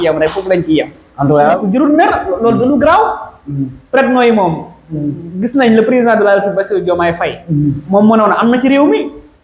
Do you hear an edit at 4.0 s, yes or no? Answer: no